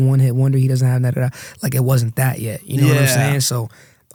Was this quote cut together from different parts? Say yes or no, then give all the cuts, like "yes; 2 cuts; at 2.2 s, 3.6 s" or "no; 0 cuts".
no; 0 cuts